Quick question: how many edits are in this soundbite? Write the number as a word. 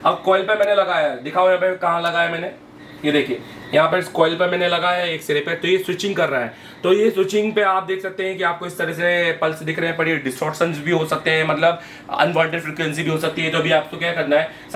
zero